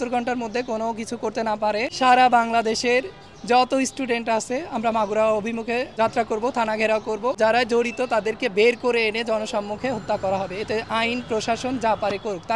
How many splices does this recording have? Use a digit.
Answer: 3